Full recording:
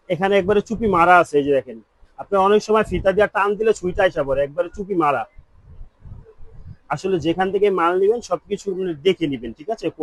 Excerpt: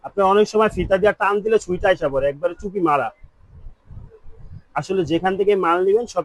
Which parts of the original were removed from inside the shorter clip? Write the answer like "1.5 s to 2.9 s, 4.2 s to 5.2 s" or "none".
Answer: none